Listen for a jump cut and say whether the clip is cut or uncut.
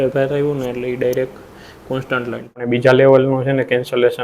cut